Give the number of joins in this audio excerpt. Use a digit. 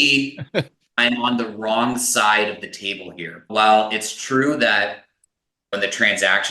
2